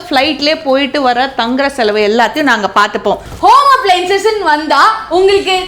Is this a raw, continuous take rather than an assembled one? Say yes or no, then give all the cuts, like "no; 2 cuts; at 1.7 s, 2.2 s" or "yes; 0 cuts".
no; 1 cut; at 3.2 s